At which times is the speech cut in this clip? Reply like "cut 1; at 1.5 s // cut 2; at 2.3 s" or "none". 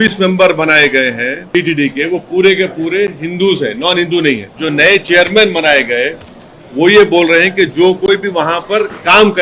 cut 1; at 1.3 s // cut 2; at 4.5 s